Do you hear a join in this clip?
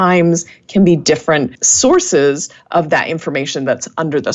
yes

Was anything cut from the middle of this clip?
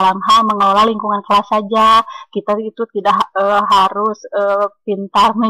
no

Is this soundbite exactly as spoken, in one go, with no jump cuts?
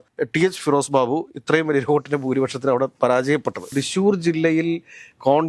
no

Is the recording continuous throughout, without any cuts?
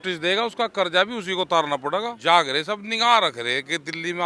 no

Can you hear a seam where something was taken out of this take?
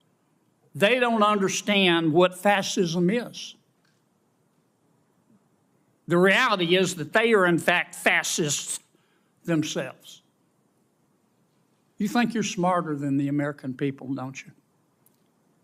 yes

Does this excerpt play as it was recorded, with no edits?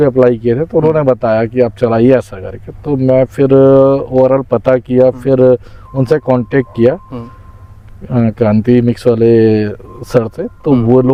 yes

